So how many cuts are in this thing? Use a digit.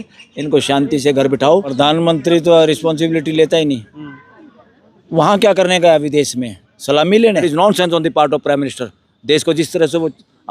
2